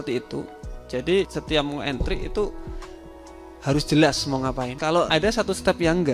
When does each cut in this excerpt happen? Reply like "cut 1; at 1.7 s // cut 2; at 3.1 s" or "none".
cut 1; at 1.3 s // cut 2; at 5.0 s